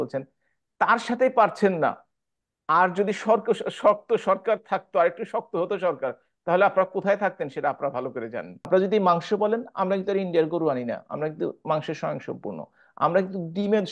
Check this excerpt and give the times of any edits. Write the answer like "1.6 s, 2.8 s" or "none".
8.7 s